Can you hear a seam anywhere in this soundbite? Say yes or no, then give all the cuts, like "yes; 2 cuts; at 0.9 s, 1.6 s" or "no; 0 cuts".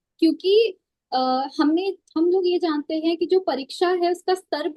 no; 0 cuts